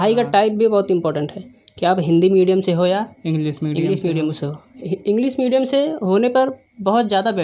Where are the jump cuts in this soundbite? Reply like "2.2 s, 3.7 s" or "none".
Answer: none